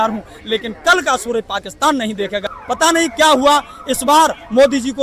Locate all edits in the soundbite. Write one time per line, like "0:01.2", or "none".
0:02.4